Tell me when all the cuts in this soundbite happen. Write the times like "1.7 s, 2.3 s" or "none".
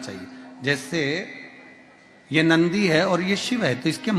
none